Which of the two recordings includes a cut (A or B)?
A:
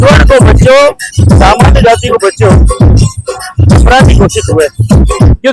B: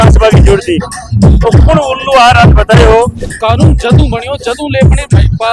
B